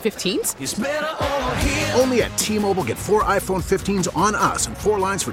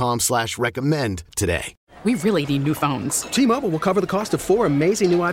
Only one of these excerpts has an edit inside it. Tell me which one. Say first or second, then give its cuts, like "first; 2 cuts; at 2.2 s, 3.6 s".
second; 1 cut; at 1.7 s